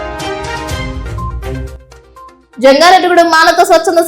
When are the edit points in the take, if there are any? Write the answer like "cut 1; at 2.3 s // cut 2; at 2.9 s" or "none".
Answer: cut 1; at 0.9 s